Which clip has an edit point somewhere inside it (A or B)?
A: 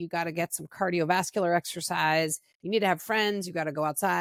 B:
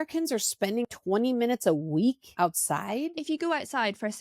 B